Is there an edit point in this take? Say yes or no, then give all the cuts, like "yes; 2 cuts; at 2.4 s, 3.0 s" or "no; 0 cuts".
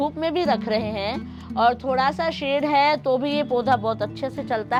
no; 0 cuts